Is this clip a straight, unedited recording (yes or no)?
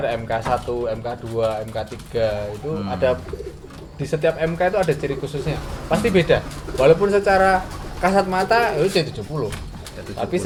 yes